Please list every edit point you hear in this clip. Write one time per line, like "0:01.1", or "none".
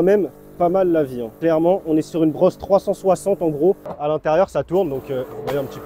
0:01.2
0:03.9